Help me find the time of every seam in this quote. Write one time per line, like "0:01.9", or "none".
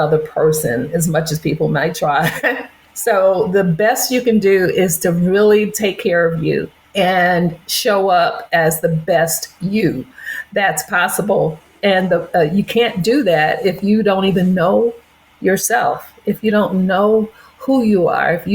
0:02.9
0:06.8